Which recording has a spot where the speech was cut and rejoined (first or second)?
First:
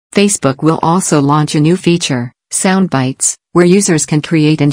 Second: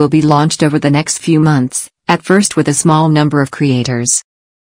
first